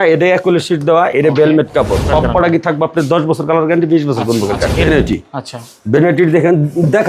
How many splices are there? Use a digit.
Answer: 2